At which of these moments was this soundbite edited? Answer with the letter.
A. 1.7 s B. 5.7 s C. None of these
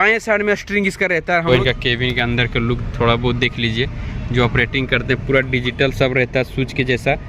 A